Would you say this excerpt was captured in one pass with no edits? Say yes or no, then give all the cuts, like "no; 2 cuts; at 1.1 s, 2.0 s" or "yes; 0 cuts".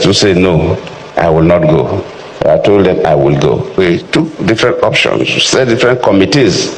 no; 1 cut; at 3.8 s